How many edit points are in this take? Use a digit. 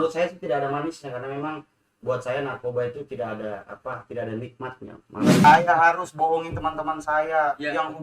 1